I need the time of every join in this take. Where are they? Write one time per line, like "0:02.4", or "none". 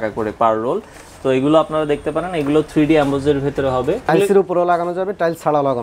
0:04.1